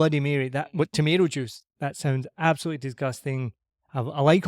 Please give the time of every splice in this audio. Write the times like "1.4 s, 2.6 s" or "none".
1.6 s

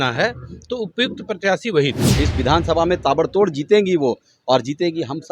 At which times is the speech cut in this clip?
2.2 s

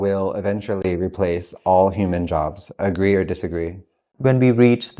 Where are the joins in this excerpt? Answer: none

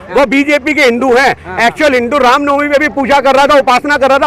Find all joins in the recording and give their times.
none

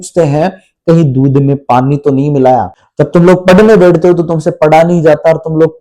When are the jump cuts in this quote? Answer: 2.8 s

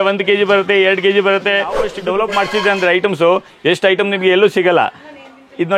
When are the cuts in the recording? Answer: 1.9 s

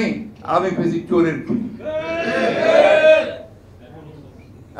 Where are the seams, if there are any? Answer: none

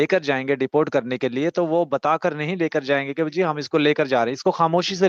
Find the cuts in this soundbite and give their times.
none

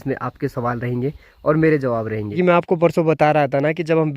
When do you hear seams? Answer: 2.3 s

